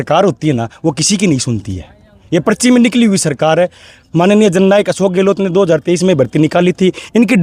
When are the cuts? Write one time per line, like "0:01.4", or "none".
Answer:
none